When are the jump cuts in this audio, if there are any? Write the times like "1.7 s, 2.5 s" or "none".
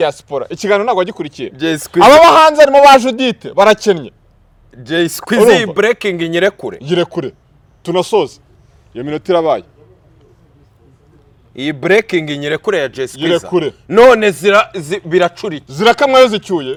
none